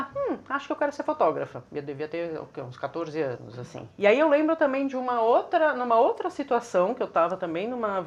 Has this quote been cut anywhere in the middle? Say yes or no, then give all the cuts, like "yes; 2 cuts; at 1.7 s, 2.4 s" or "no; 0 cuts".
no; 0 cuts